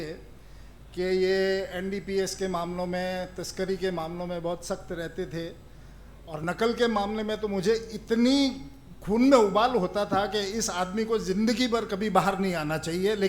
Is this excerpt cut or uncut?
uncut